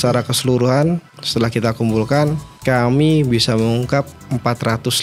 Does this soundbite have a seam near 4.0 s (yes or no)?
no